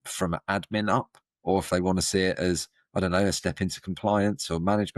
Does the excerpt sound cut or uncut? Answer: uncut